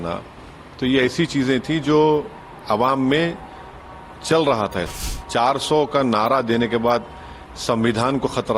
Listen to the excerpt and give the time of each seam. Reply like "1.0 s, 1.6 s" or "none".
5.0 s